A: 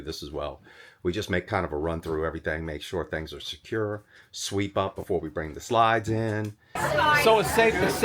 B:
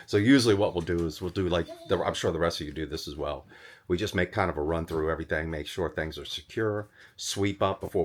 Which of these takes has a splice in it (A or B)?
A